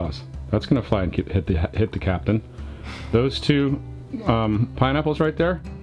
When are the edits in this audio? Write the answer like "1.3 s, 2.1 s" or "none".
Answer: none